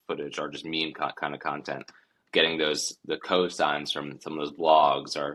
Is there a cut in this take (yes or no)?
no